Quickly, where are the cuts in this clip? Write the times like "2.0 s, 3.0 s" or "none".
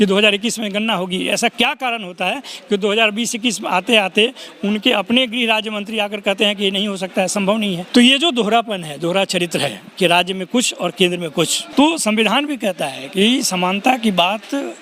7.8 s, 11.6 s